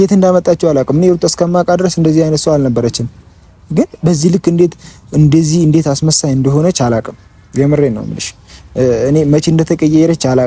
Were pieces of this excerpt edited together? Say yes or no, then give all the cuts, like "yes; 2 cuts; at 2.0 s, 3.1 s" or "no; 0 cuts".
no; 0 cuts